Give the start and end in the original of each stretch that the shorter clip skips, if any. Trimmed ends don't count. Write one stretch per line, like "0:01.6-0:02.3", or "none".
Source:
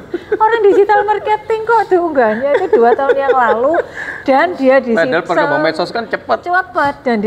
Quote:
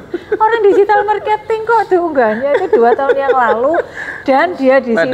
none